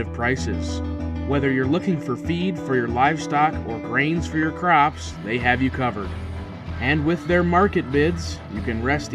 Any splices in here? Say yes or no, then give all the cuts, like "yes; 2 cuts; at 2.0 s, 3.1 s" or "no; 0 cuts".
no; 0 cuts